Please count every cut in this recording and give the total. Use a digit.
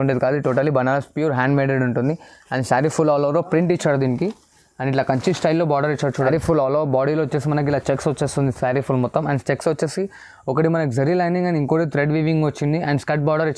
1